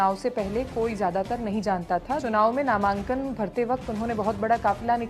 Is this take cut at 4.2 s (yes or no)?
no